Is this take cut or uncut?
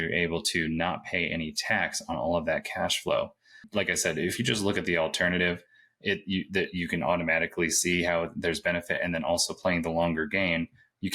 cut